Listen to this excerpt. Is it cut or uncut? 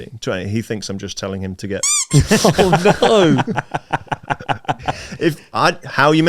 cut